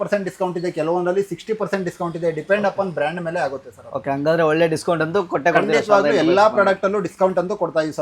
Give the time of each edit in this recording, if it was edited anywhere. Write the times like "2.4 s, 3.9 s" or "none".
none